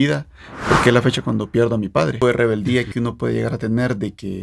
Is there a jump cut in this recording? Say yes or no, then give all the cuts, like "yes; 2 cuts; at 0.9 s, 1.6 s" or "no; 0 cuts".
yes; 1 cut; at 2.2 s